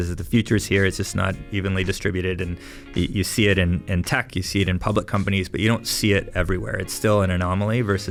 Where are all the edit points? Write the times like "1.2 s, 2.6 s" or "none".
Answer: none